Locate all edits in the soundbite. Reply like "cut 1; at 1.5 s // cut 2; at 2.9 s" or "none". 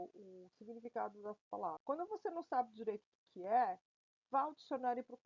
cut 1; at 1.8 s